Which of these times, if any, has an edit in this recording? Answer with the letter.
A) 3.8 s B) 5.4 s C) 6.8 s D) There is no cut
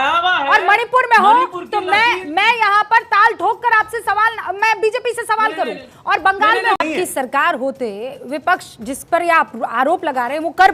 C